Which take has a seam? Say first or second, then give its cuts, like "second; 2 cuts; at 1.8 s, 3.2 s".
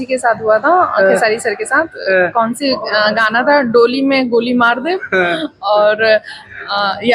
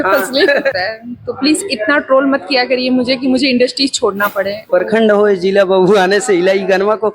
second; 2 cuts; at 0.7 s, 4.6 s